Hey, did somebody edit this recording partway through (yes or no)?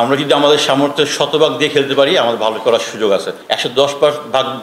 yes